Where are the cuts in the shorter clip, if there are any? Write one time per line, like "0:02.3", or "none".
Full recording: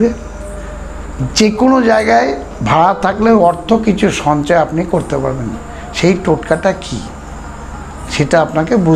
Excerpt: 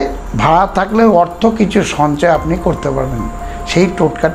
none